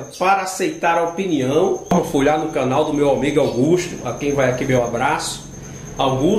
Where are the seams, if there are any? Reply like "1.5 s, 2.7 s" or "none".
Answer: 1.9 s